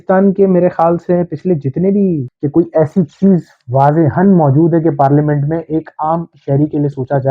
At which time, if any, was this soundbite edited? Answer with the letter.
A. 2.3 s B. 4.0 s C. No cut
A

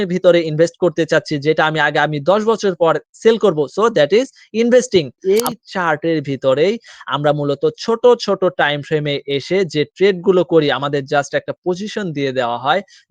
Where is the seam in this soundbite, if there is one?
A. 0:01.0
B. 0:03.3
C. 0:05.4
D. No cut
C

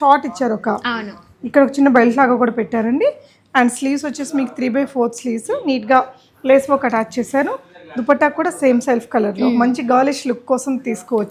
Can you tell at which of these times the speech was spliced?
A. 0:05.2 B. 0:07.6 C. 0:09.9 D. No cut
D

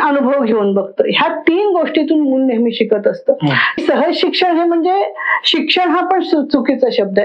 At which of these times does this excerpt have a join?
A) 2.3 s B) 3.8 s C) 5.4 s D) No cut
B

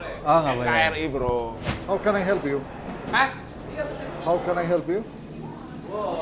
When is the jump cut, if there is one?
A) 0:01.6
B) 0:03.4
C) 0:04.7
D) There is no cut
A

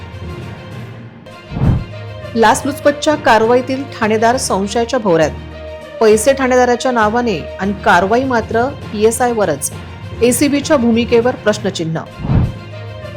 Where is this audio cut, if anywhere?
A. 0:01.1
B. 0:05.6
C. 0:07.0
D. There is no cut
A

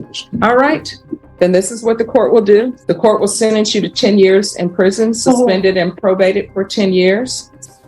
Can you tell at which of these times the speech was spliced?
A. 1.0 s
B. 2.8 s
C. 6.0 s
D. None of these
B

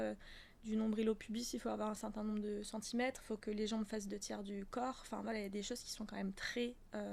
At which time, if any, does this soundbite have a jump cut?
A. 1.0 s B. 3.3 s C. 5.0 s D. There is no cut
D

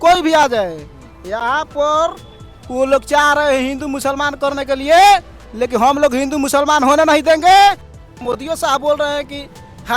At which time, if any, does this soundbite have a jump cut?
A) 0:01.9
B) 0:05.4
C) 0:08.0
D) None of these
C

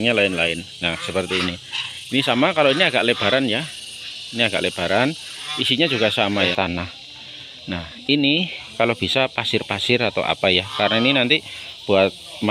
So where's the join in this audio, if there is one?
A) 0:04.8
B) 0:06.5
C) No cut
B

